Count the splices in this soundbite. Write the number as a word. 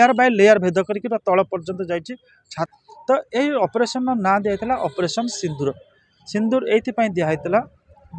one